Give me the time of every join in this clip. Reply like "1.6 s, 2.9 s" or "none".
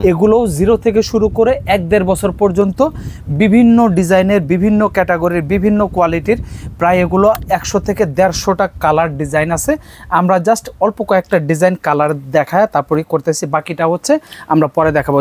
none